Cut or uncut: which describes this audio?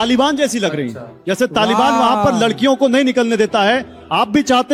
uncut